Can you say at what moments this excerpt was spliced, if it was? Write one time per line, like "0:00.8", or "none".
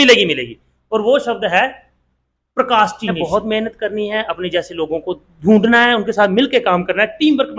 0:03.2